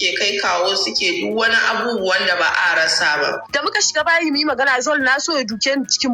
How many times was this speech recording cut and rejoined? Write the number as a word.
one